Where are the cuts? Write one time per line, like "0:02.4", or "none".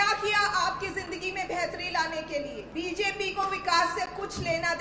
0:02.6